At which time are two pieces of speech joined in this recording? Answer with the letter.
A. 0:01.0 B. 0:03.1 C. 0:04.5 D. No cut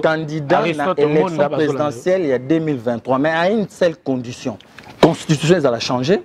C